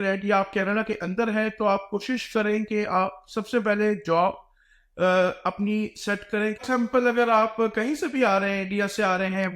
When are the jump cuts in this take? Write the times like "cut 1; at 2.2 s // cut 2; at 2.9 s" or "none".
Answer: cut 1; at 6.6 s

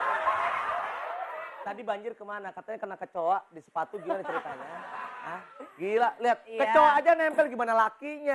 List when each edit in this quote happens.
cut 1; at 1.5 s

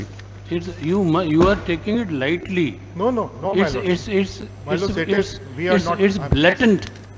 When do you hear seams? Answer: none

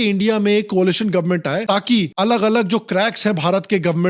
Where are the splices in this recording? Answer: none

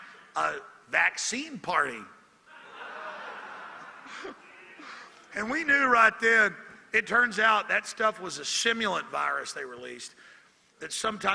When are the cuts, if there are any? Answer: cut 1; at 3.1 s

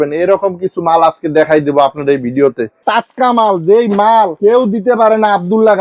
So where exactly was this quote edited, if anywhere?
cut 1; at 2.8 s

